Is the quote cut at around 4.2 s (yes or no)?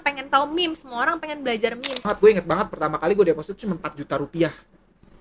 no